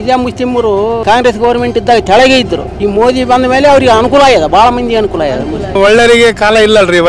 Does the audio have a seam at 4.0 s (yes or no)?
no